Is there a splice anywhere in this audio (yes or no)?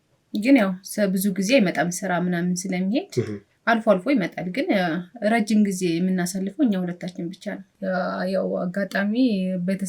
yes